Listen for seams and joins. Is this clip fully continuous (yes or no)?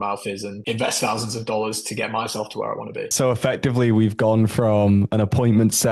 no